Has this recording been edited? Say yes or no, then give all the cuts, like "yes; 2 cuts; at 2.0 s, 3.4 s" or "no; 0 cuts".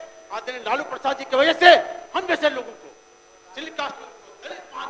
no; 0 cuts